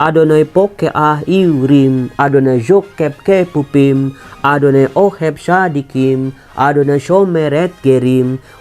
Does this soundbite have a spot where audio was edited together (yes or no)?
no